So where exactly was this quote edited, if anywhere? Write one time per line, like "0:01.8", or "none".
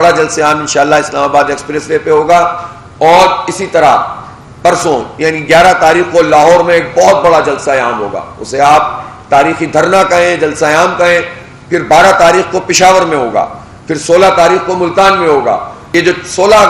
0:15.8